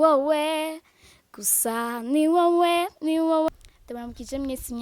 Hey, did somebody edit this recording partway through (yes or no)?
yes